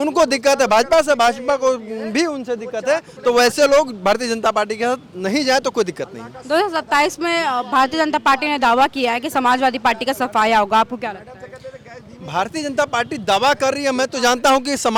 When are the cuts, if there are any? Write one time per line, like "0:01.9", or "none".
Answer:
none